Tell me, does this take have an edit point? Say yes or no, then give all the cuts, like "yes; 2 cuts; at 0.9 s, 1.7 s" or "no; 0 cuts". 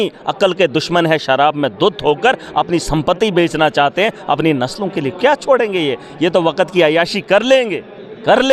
no; 0 cuts